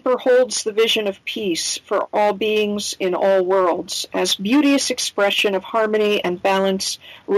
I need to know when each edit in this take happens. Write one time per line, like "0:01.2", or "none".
0:02.1